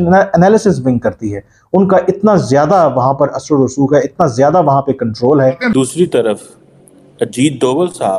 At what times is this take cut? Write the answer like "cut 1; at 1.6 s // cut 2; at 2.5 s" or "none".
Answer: cut 1; at 5.6 s